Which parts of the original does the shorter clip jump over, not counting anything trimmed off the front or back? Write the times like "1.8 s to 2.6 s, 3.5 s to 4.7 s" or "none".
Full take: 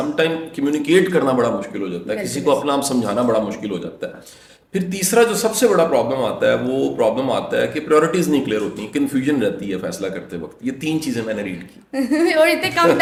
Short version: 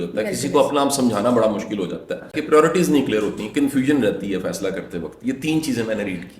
4.3 s to 7.8 s